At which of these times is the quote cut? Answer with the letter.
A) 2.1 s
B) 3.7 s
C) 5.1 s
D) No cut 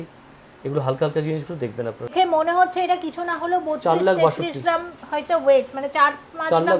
A